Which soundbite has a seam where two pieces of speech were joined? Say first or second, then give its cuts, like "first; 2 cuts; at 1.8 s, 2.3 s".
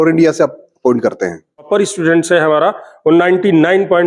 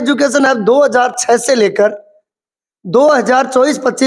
first; 1 cut; at 1.7 s